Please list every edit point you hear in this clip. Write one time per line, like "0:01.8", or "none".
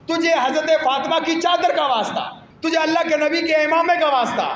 0:02.4